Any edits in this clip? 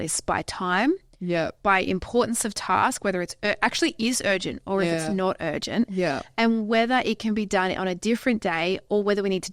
no; 0 cuts

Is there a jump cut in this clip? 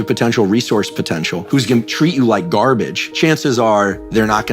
yes; 2 cuts; at 1.4 s, 3.0 s

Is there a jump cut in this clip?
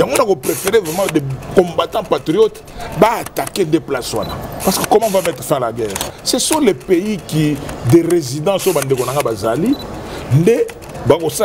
yes; 2 cuts; at 4.5 s, 6.1 s

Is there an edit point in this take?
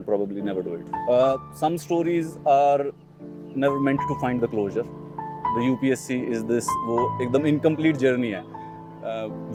no; 0 cuts

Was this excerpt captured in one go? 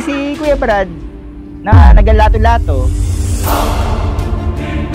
yes; 0 cuts

